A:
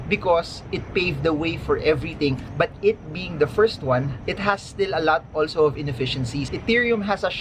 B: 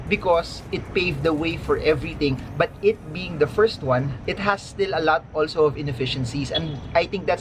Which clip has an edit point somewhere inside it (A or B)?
A